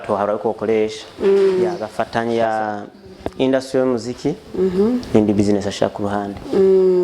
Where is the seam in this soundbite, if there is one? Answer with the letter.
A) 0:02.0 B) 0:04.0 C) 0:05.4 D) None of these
A